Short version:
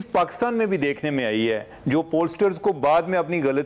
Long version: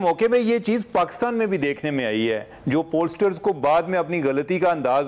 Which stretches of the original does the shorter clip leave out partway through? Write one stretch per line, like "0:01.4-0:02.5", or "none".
none